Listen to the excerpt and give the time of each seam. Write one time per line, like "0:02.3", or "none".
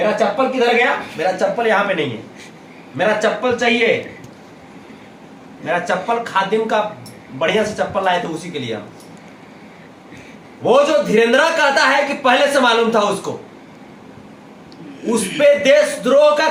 none

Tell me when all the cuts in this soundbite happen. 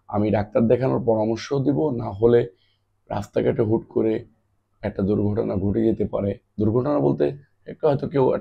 0:06.4

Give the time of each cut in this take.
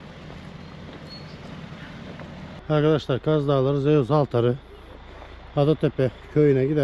0:02.6

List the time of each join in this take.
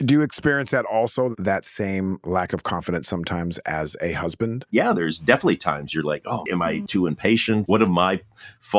0:04.6
0:06.5
0:07.6

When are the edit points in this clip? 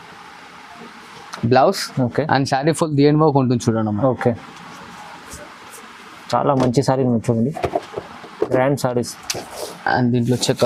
none

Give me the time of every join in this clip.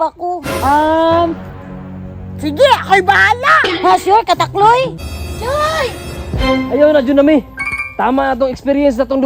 0:05.0

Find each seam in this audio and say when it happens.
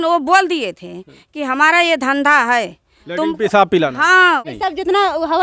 0:04.5

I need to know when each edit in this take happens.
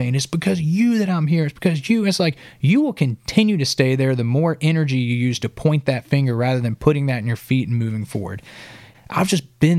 0:08.9

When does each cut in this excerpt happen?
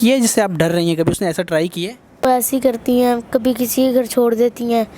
0:02.2

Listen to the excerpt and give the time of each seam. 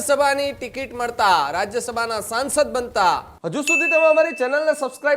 0:03.3

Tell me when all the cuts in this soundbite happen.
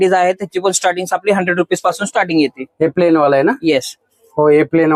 none

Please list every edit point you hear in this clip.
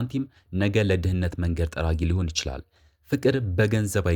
none

